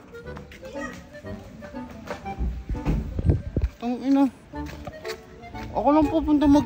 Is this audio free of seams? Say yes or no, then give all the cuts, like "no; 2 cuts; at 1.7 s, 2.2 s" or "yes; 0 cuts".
yes; 0 cuts